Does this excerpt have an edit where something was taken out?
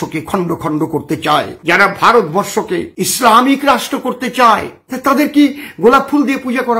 yes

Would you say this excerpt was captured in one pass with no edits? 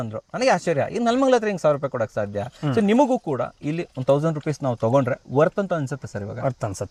yes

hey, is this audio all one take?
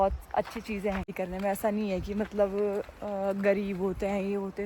no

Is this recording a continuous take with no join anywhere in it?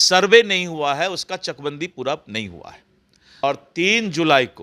no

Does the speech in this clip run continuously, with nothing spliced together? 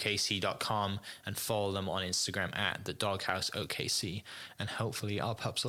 yes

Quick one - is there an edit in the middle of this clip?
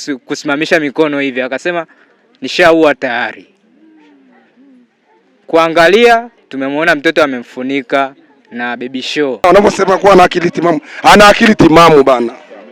yes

